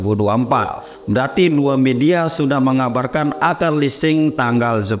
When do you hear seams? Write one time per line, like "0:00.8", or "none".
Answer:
none